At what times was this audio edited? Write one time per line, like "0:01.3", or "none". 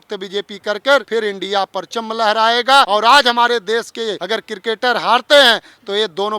0:01.1
0:02.9
0:04.2